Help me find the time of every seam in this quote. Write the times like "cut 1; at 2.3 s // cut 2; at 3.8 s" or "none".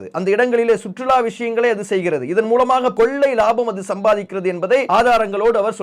cut 1; at 2.9 s // cut 2; at 4.9 s